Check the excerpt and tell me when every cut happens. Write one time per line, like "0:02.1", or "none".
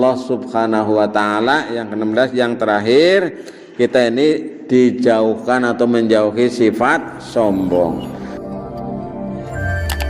0:08.6